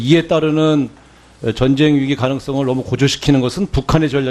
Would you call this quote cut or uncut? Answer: cut